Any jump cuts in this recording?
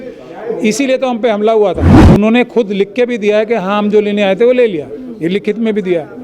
yes; 1 cut; at 1.9 s

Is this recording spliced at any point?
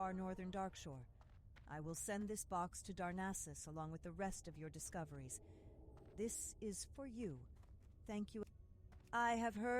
yes; 1 cut; at 8.4 s

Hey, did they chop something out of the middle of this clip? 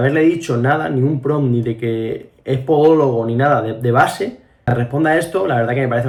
no; 0 cuts

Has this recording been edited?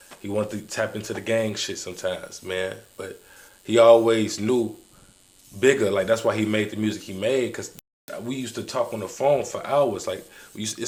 no; 0 cuts

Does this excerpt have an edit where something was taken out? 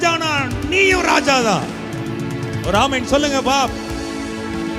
no; 0 cuts

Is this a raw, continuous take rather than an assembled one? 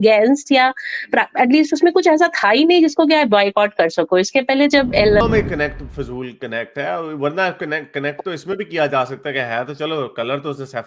no; 1 cut; at 5.2 s

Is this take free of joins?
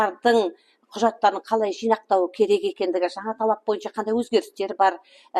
yes; 0 cuts

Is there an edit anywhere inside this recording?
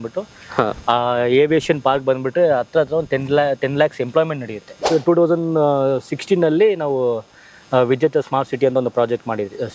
yes; 1 cut; at 4.9 s

